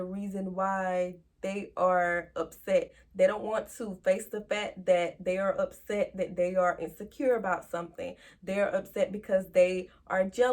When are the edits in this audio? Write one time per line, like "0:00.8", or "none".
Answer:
none